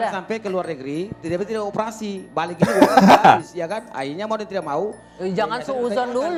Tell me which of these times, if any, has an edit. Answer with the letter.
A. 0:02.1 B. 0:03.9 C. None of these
C